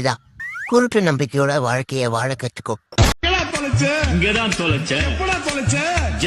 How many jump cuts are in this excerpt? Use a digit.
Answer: 1